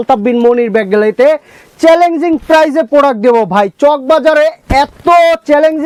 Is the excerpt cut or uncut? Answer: uncut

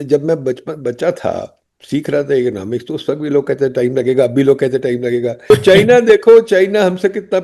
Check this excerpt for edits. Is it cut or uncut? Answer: cut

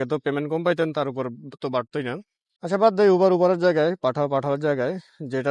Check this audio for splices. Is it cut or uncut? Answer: uncut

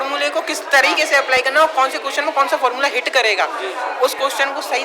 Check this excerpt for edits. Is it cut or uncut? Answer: uncut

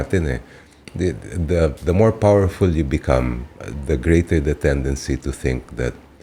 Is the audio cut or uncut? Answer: uncut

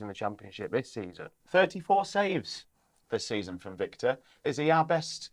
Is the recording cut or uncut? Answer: cut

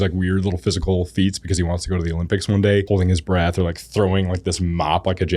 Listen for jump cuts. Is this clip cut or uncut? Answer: cut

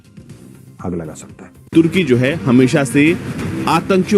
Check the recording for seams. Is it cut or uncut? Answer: cut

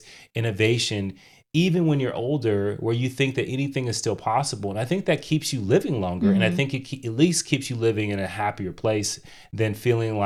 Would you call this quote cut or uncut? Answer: uncut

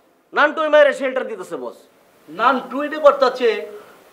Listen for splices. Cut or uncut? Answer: uncut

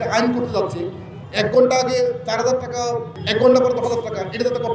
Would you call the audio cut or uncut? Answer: cut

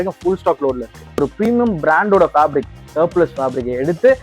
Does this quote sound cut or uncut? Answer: cut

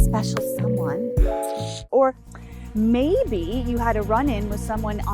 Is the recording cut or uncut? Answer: cut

